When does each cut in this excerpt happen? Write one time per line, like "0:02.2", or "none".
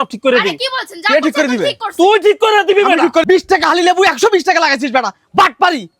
0:03.2